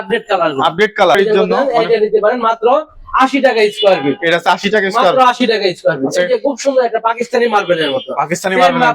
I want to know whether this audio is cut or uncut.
cut